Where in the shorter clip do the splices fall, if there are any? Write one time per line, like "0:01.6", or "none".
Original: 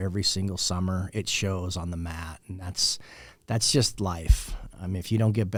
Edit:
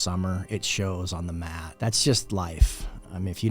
0:01.6